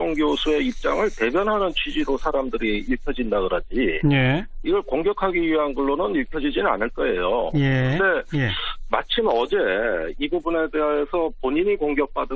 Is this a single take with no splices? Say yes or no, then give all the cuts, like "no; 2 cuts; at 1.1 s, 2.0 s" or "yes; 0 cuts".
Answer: no; 1 cut; at 3.6 s